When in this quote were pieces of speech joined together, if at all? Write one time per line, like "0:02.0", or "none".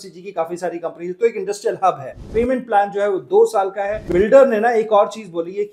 0:02.2
0:04.0